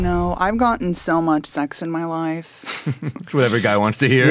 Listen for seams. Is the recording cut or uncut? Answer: uncut